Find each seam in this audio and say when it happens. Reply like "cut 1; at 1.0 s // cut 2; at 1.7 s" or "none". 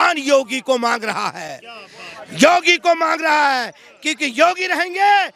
none